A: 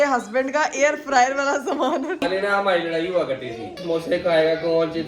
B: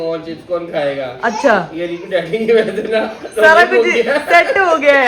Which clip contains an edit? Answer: A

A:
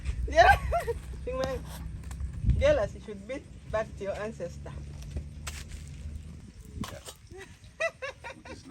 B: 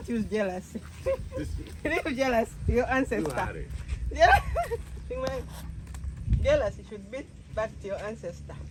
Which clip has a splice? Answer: A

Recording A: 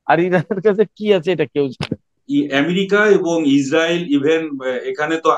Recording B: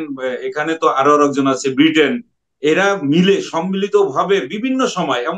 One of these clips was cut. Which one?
A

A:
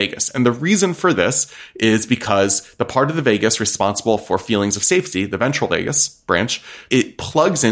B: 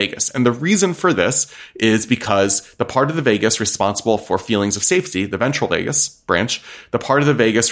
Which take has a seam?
A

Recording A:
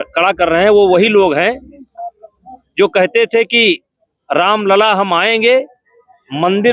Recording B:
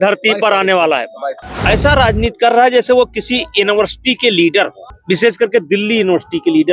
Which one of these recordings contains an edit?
B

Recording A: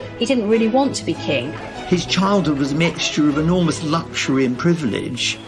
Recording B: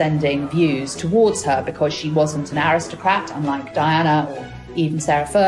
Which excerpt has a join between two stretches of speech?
A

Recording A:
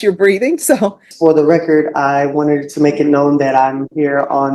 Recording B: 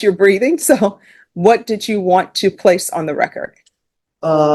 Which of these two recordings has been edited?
A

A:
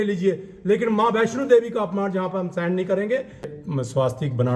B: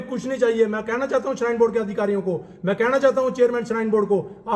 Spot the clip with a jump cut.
A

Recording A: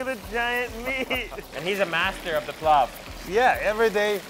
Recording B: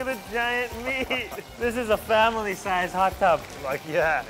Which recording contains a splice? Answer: A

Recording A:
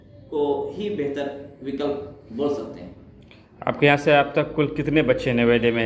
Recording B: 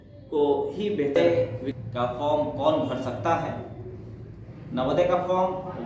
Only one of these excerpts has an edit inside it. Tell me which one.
B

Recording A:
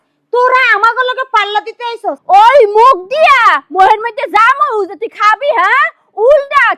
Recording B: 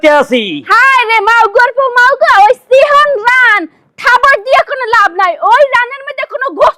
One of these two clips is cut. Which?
A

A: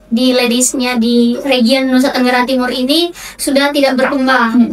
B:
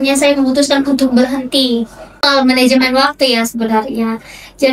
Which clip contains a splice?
B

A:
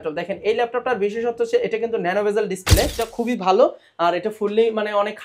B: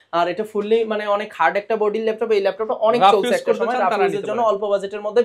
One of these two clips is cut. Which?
A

